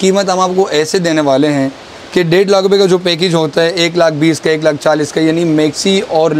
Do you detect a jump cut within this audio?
no; 0 cuts

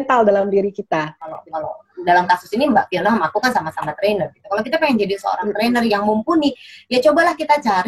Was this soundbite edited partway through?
yes; 1 cut; at 1.4 s

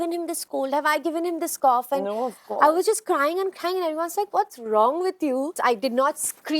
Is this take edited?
yes; 1 cut; at 5.6 s

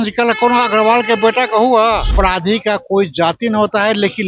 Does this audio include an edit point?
yes; 1 cut; at 2.1 s

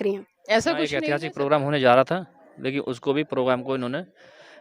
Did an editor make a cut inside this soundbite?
yes; 1 cut; at 1.0 s

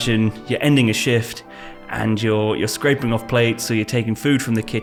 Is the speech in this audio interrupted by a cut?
no; 0 cuts

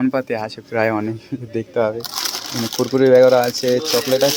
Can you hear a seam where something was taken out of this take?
no; 0 cuts

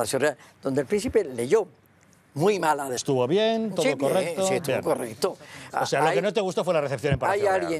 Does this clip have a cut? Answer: no; 0 cuts

